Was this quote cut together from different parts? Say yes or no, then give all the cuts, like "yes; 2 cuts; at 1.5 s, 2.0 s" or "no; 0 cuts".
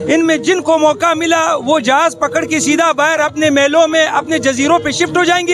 no; 0 cuts